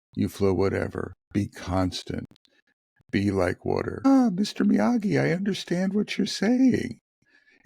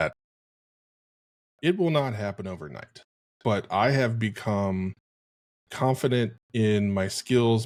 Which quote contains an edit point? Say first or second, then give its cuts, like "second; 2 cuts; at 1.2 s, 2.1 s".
first; 1 cut; at 4.0 s